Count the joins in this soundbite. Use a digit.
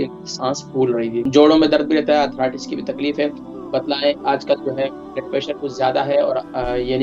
1